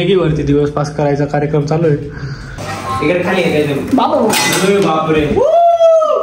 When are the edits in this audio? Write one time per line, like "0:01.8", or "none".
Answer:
0:02.8